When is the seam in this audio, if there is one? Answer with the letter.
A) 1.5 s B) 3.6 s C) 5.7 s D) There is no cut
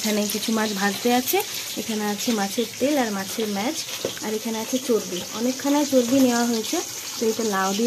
D